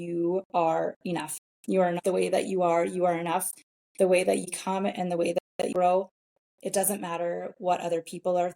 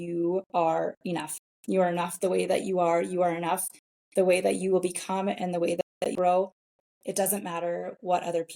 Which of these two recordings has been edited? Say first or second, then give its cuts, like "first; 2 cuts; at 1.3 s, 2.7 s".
first; 2 cuts; at 2.0 s, 4.5 s